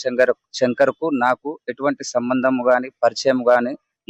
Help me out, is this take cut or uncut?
uncut